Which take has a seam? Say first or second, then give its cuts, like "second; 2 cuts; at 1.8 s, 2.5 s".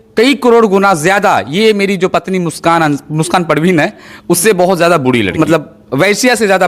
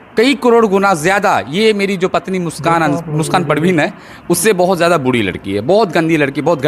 first; 1 cut; at 5.4 s